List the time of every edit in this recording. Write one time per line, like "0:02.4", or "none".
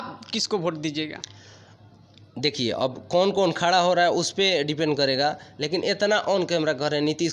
none